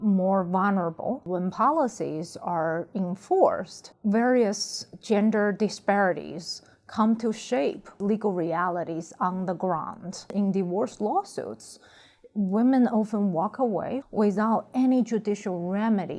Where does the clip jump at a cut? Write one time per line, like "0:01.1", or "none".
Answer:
0:01.3
0:07.9
0:10.3
0:14.0